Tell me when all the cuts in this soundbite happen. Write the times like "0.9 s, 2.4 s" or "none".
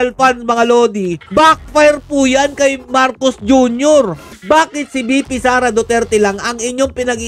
1.2 s, 4.3 s